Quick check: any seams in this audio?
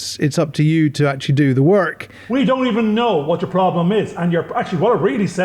yes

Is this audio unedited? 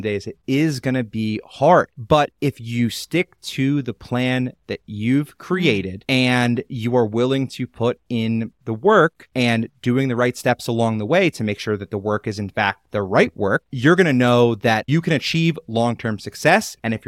yes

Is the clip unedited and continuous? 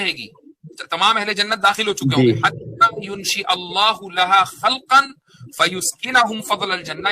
yes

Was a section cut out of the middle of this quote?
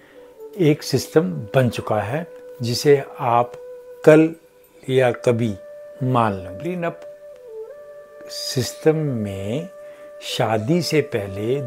yes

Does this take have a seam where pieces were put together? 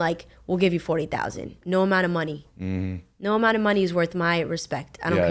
yes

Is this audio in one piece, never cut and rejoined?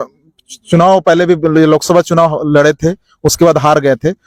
yes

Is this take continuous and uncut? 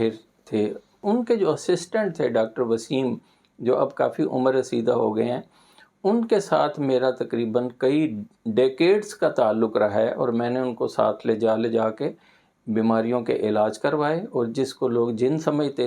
no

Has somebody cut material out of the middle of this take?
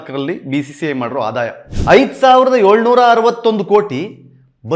yes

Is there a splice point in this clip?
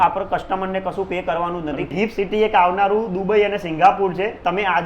yes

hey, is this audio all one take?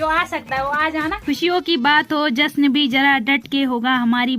no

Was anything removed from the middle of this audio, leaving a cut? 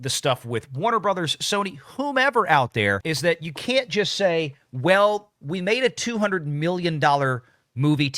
yes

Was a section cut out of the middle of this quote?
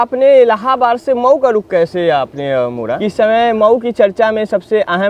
yes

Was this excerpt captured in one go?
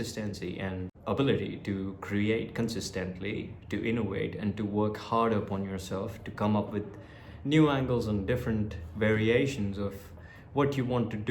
no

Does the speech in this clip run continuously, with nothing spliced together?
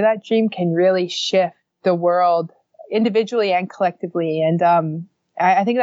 no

